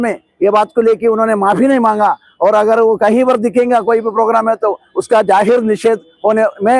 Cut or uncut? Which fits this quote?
uncut